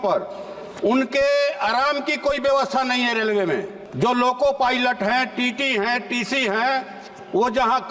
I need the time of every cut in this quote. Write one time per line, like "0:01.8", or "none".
0:03.8